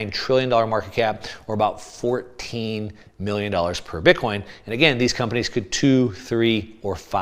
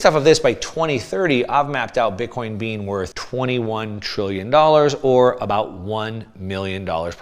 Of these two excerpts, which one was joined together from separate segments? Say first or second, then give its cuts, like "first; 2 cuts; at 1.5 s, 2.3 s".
second; 1 cut; at 3.2 s